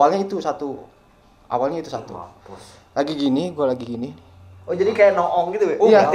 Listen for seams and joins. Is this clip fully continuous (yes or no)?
yes